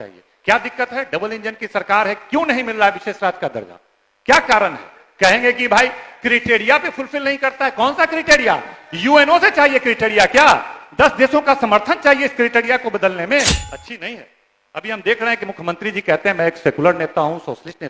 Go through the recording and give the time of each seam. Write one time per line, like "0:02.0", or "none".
0:13.6